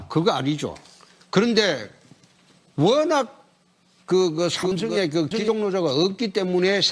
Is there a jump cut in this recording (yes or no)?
no